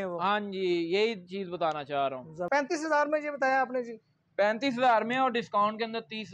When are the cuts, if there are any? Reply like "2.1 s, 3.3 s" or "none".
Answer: 2.5 s